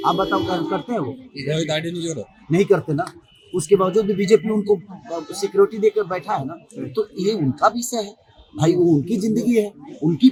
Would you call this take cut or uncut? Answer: uncut